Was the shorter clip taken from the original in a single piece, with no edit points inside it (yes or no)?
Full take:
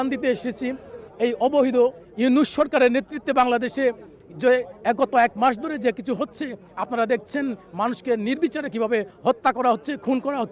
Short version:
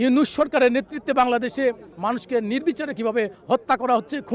no